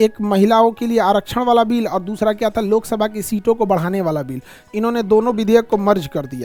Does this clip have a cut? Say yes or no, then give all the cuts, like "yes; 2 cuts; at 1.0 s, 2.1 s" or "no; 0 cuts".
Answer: no; 0 cuts